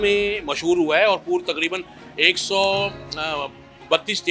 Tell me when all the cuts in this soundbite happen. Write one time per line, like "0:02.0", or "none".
none